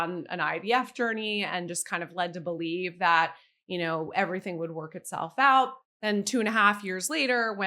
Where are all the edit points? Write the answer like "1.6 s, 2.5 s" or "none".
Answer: 5.9 s